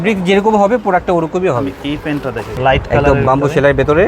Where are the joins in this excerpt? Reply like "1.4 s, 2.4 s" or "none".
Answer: 2.5 s